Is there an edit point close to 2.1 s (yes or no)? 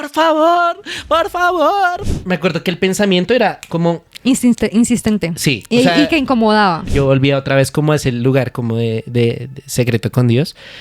yes